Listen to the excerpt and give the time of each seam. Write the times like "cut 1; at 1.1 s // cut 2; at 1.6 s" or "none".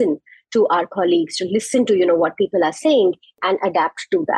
cut 1; at 3.4 s